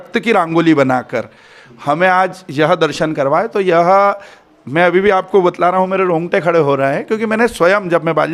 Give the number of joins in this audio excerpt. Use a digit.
0